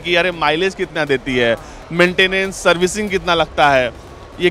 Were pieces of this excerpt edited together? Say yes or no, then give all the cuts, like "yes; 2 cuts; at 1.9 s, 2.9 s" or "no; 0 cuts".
no; 0 cuts